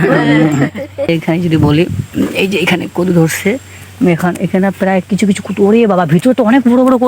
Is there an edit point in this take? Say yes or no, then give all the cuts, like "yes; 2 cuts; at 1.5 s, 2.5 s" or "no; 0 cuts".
yes; 1 cut; at 1.1 s